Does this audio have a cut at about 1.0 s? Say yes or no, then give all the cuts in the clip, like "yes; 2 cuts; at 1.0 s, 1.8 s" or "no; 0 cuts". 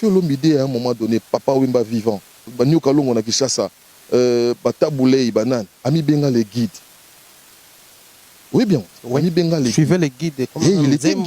no; 1 cut; at 2.5 s